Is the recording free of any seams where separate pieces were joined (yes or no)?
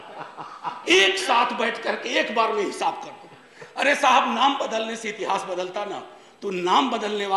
yes